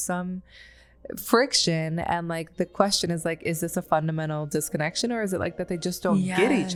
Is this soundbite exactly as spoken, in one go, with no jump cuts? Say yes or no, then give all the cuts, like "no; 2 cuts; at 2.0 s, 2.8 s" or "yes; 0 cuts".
yes; 0 cuts